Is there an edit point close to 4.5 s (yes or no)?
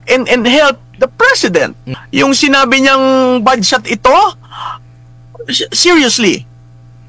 no